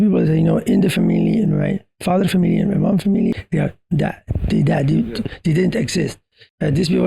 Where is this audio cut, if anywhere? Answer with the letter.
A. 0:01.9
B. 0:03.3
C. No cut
B